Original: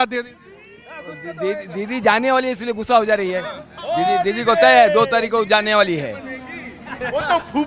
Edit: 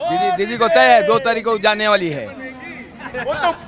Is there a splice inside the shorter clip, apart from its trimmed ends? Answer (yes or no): no